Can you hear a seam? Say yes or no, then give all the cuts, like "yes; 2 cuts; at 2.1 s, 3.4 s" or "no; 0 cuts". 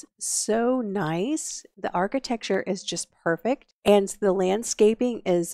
yes; 2 cuts; at 1.9 s, 3.7 s